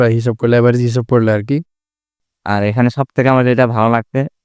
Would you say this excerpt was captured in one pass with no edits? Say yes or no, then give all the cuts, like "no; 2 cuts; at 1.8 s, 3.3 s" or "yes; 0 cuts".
no; 1 cut; at 2.1 s